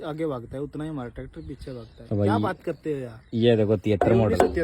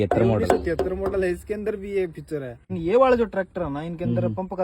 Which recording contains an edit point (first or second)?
second